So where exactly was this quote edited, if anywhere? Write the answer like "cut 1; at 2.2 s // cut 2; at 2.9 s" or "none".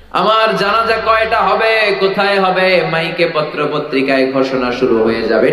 none